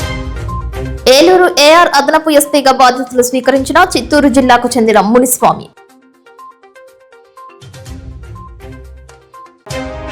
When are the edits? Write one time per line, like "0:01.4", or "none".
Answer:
0:01.0
0:05.7